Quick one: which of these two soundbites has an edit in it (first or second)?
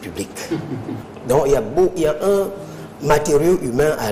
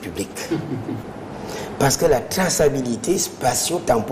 second